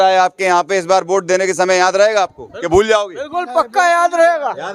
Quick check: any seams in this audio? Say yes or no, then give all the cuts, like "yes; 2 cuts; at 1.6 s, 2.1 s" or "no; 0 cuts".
no; 0 cuts